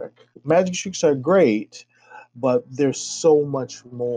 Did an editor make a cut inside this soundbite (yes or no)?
no